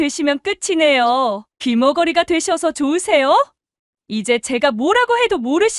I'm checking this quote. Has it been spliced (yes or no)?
no